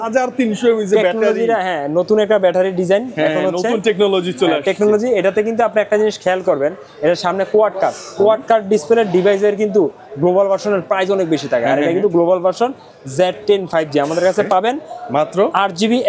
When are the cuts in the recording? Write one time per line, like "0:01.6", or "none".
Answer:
none